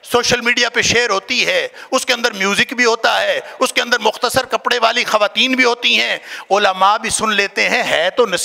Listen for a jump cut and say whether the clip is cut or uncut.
uncut